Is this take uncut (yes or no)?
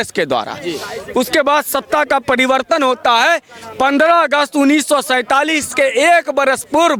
yes